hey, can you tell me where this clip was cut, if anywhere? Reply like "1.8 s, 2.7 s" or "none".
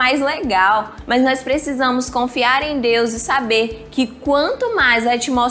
1.0 s